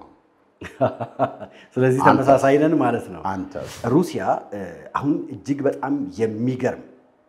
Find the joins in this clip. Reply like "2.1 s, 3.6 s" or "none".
3.8 s